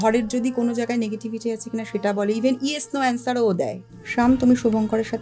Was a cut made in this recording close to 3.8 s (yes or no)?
yes